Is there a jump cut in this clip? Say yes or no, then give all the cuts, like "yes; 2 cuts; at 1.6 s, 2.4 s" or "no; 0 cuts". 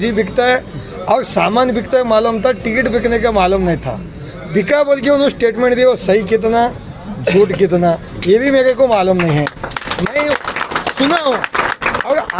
no; 0 cuts